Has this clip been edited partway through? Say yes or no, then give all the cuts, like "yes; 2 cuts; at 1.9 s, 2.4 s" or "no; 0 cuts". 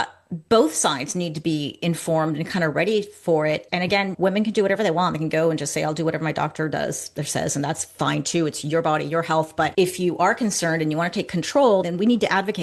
yes; 1 cut; at 9.7 s